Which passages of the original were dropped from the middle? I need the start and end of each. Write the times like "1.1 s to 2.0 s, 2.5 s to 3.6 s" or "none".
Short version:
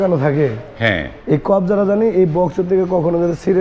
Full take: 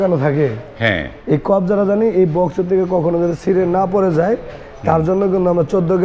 none